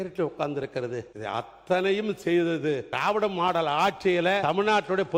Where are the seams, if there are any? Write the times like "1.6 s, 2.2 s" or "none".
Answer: 1.1 s, 2.9 s, 4.4 s